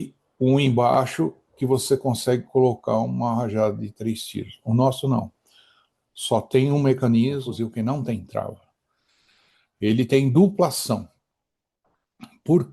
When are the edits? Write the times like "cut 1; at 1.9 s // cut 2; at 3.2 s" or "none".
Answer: cut 1; at 7.4 s